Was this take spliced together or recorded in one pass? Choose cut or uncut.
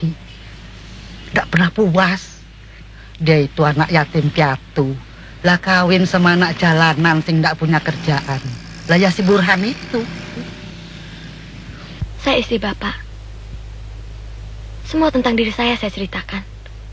cut